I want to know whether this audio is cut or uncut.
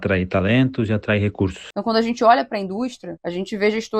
cut